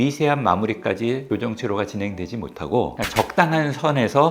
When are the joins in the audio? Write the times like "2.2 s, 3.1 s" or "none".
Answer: 1.3 s